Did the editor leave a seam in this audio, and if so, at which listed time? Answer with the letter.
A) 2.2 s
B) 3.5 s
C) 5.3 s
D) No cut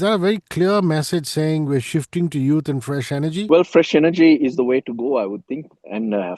B